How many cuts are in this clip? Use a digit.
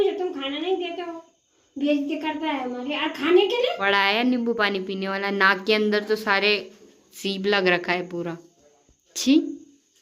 1